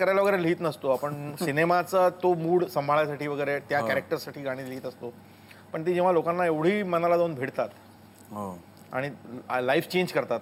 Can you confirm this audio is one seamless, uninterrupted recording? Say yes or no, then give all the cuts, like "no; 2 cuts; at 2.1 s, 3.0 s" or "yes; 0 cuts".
yes; 0 cuts